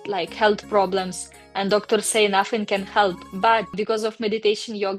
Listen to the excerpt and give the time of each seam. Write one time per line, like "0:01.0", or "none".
none

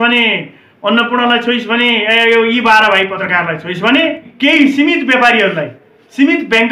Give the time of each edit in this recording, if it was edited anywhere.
0:03.2
0:04.3

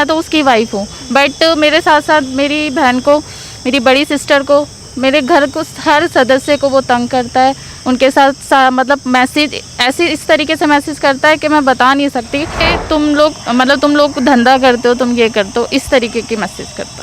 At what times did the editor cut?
0:12.7

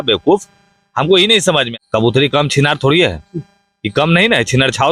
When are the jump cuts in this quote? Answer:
0:01.7

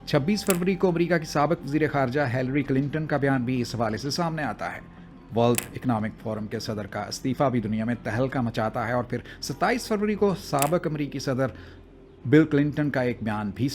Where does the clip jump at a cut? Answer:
none

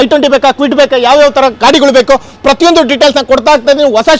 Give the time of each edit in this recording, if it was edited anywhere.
none

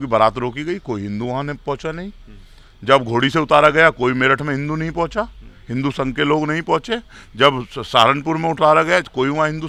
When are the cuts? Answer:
none

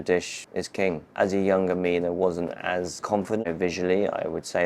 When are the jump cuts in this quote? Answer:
0:00.9
0:03.5

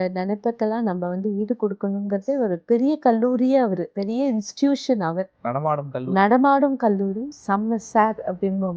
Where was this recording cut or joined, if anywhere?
0:02.6
0:03.9
0:07.3

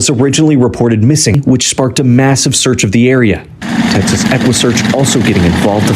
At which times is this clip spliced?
0:01.4

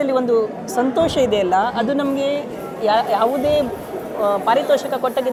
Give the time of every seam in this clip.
none

